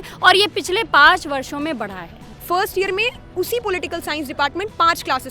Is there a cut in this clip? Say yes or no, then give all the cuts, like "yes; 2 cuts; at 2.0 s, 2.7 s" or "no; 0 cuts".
yes; 1 cut; at 2.2 s